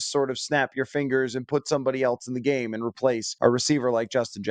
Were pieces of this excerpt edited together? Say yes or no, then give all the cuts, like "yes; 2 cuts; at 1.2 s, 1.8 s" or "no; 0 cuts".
yes; 1 cut; at 3.3 s